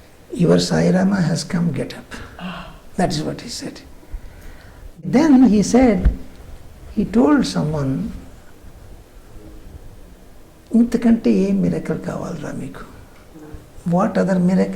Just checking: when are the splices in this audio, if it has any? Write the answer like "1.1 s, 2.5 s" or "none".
5.1 s